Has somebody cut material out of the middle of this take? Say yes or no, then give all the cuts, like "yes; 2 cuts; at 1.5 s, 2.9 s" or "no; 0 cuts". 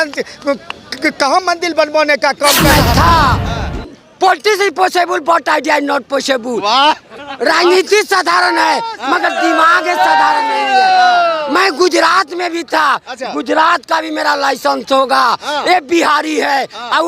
yes; 1 cut; at 2.6 s